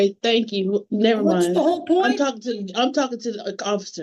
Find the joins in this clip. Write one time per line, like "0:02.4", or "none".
none